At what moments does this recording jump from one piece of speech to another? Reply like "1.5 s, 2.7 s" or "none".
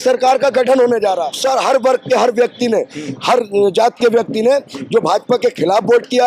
1.3 s